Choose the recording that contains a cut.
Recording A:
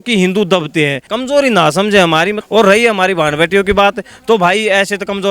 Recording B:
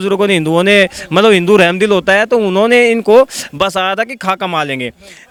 A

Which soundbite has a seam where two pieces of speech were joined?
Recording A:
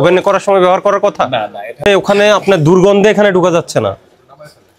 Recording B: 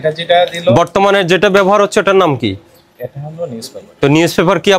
A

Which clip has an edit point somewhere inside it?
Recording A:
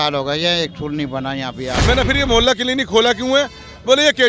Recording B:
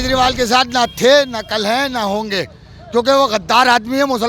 A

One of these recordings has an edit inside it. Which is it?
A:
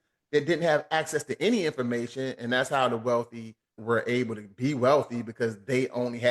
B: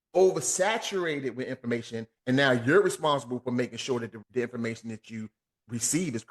B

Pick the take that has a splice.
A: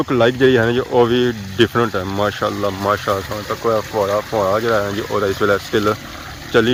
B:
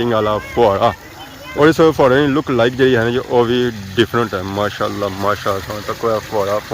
B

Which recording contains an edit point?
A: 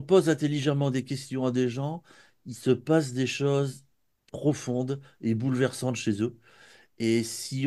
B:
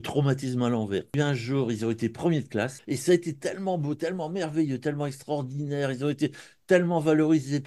B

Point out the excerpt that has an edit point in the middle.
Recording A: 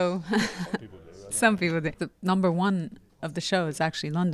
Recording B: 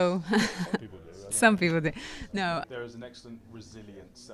A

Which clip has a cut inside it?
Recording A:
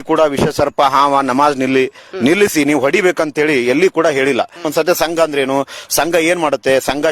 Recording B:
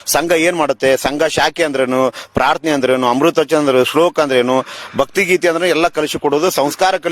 A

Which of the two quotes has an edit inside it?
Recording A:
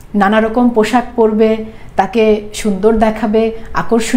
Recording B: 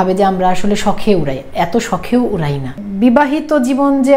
B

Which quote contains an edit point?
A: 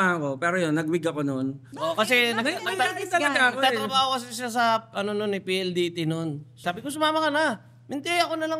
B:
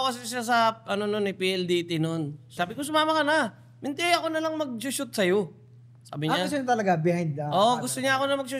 A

